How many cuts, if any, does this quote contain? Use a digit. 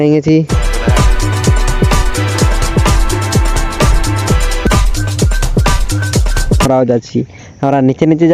2